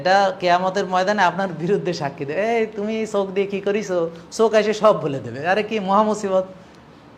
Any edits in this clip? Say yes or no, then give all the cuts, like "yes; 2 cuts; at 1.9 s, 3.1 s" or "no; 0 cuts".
no; 0 cuts